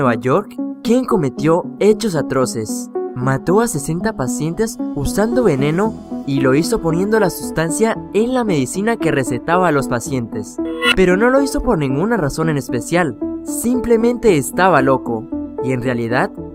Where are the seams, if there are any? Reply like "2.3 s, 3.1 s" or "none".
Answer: none

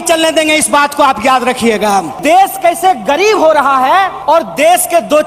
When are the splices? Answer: 2.2 s, 4.2 s

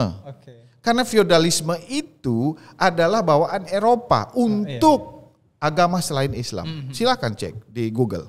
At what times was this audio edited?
none

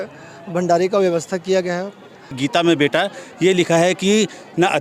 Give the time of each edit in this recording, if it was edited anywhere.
2.3 s

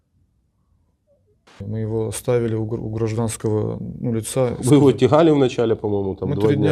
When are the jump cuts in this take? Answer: 1.6 s

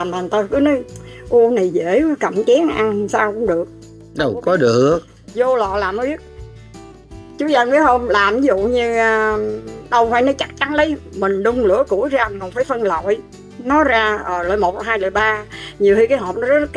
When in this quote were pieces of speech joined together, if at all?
none

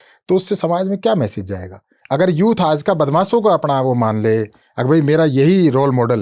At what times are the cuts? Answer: 2.0 s

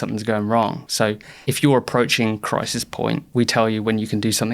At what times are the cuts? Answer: 0.9 s, 3.2 s

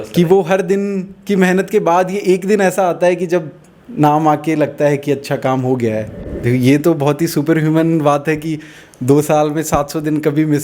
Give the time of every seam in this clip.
6.3 s

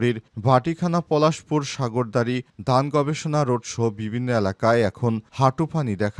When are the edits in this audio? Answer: none

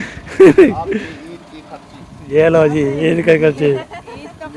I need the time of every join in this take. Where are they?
none

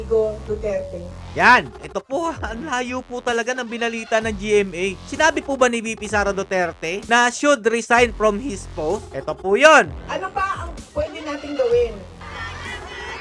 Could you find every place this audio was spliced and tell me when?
1.7 s, 10.0 s

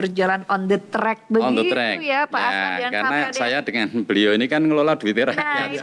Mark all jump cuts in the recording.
none

